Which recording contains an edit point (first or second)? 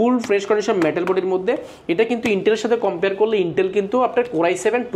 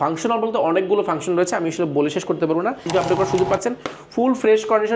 second